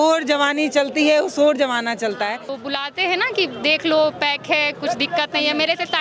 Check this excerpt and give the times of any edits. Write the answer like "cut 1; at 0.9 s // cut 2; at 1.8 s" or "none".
cut 1; at 2.5 s